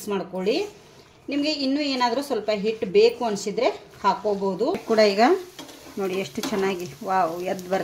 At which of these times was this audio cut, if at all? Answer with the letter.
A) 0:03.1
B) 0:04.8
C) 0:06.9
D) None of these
B